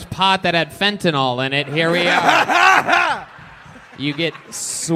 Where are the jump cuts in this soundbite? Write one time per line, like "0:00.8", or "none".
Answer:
none

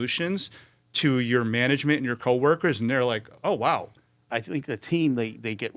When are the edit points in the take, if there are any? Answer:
0:04.3

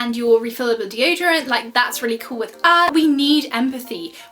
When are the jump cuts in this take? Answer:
0:02.9

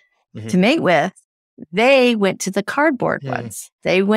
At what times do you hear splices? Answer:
none

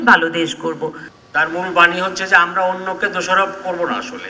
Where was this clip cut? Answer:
0:01.1

